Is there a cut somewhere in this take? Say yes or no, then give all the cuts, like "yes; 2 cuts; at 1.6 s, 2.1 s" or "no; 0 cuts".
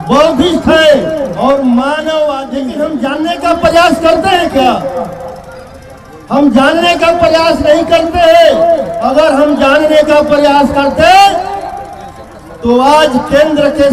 yes; 1 cut; at 2.7 s